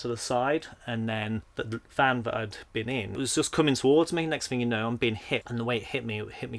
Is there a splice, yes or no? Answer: yes